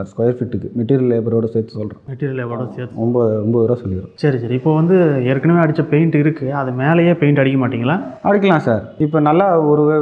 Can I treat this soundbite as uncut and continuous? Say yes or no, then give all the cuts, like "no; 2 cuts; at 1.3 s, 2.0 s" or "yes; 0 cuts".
yes; 0 cuts